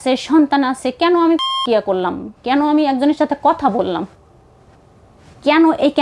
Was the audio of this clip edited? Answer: no; 0 cuts

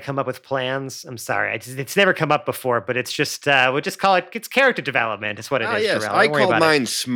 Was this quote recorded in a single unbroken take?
no; 1 cut; at 6.1 s

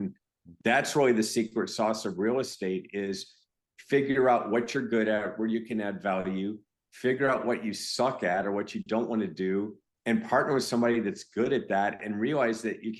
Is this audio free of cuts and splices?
yes; 0 cuts

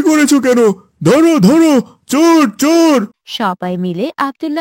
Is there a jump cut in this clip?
no; 0 cuts

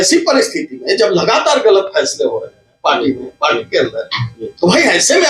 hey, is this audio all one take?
yes; 0 cuts

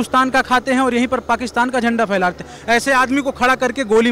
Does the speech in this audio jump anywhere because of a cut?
no; 0 cuts

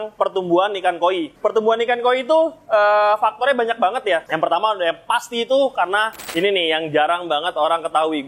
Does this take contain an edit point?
yes; 3 cuts; at 1.3 s, 4.3 s, 6.2 s

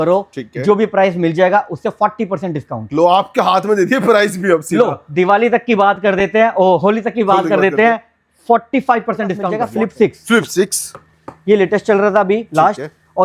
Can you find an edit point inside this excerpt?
yes; 1 cut; at 9.5 s

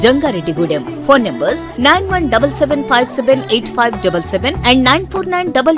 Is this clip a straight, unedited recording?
yes; 0 cuts

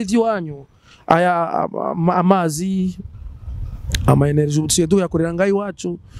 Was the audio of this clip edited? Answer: no; 0 cuts

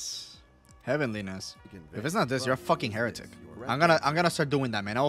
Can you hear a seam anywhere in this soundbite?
yes; 1 cut; at 3.5 s

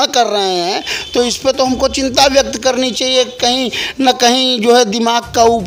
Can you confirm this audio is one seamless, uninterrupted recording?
yes; 0 cuts

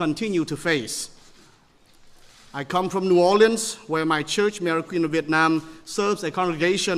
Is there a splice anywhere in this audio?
yes; 1 cut; at 1.2 s

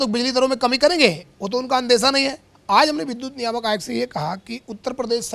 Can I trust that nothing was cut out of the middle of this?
no; 1 cut; at 2.5 s

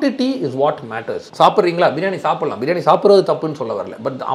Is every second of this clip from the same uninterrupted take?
no; 1 cut; at 1.2 s

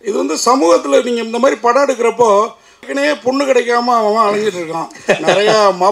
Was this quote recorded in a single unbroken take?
no; 1 cut; at 2.9 s

